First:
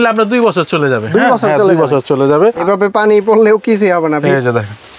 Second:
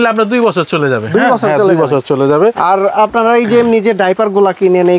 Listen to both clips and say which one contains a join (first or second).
first